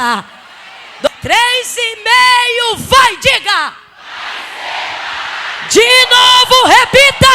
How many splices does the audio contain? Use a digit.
1